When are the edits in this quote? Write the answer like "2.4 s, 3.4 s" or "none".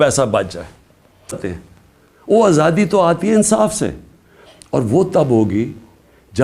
1.5 s